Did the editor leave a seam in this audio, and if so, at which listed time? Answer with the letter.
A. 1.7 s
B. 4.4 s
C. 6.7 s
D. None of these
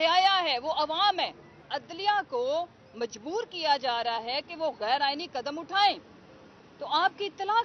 A